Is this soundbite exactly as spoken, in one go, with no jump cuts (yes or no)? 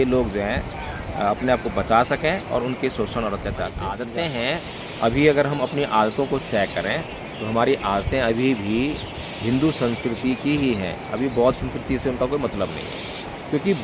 no